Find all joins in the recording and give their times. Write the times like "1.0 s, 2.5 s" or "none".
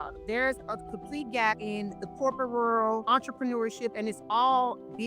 1.7 s, 3.0 s